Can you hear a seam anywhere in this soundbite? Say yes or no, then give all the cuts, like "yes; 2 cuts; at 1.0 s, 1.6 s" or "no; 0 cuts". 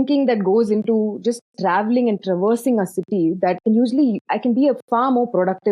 yes; 2 cuts; at 3.6 s, 4.3 s